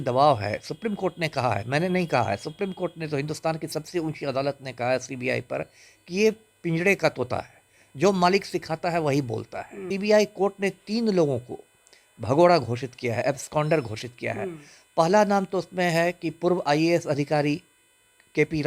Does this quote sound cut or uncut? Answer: cut